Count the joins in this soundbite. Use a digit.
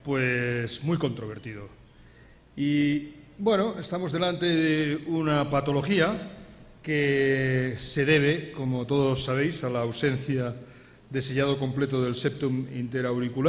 0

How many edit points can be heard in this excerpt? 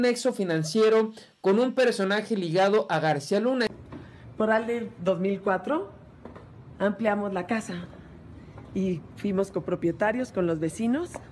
1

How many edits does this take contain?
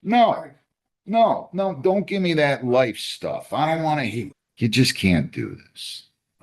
1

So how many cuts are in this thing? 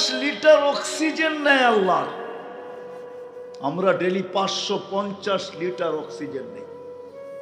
0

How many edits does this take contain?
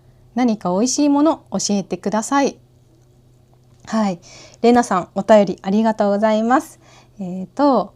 0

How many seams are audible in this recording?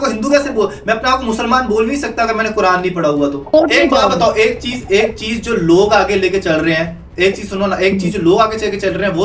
1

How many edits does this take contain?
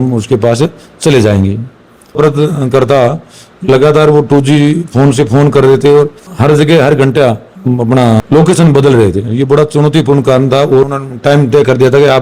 2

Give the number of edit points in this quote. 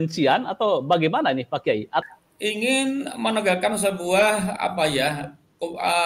1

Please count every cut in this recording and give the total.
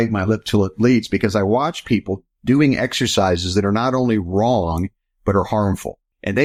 0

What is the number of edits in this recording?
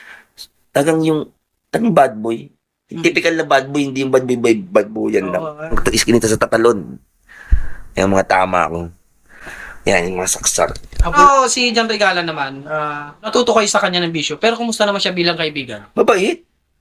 2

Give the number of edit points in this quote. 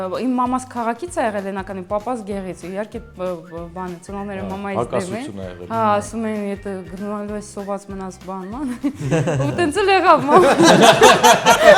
0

